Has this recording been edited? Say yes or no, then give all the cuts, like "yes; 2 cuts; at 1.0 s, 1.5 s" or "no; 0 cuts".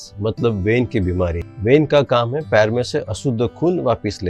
yes; 1 cut; at 1.5 s